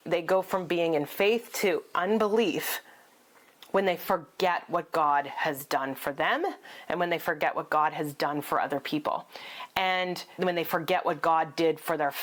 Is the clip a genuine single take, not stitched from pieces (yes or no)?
yes